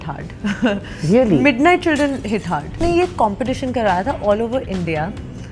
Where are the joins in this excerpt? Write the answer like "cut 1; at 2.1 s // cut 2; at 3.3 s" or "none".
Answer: cut 1; at 2.8 s